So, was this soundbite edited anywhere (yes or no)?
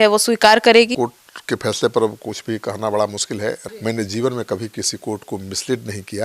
yes